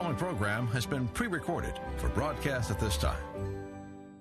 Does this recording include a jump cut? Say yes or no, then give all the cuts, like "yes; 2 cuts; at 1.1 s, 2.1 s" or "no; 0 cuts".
no; 0 cuts